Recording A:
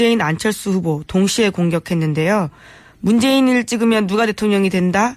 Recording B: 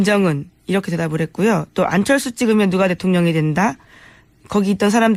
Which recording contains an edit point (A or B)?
A